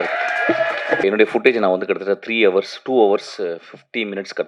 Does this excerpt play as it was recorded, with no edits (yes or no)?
no